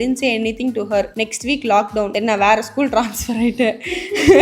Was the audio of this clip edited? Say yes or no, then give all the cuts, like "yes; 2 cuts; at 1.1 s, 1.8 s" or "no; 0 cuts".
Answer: yes; 2 cuts; at 1.1 s, 2.1 s